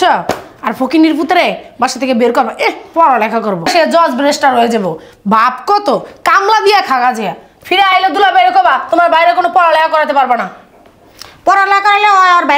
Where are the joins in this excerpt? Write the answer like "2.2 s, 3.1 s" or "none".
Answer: none

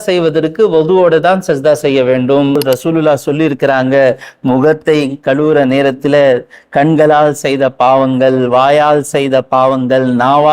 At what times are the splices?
2.6 s

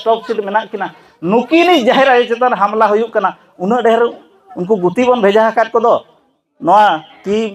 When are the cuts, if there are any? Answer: none

